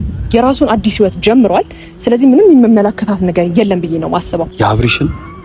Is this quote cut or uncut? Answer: cut